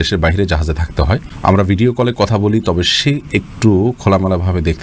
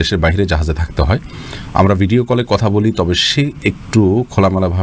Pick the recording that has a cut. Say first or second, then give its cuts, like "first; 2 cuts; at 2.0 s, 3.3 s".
first; 1 cut; at 1.3 s